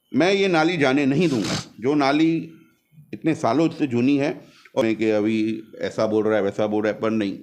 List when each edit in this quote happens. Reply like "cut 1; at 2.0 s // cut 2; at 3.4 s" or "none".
cut 1; at 4.8 s